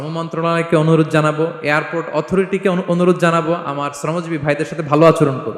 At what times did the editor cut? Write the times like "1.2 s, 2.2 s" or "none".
none